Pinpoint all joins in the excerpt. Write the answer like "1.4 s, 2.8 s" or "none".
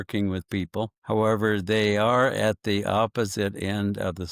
1.0 s

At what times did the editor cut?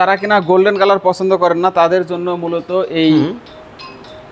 none

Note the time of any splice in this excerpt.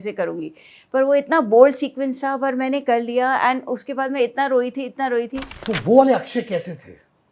5.5 s

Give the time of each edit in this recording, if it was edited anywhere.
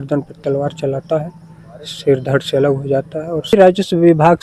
3.5 s

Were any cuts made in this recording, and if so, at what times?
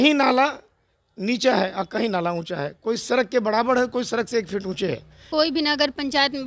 5.3 s

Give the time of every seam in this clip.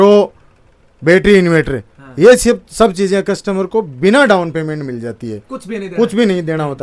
none

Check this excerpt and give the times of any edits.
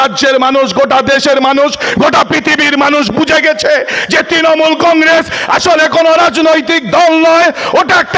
none

